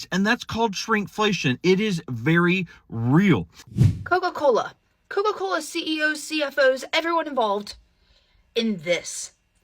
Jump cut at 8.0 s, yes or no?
no